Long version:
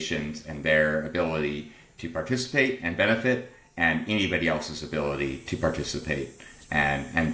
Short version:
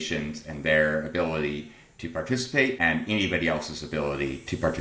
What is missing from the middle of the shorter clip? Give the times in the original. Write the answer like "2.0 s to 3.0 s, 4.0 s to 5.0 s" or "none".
2.8 s to 3.8 s